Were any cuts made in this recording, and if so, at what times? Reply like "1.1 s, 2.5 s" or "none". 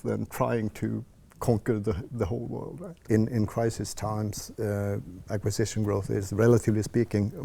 2.9 s